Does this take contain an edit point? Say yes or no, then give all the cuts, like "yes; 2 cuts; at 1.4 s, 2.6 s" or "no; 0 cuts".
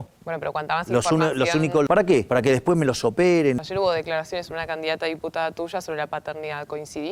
yes; 2 cuts; at 2.0 s, 3.6 s